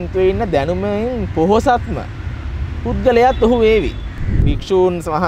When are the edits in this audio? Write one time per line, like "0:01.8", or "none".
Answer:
0:04.3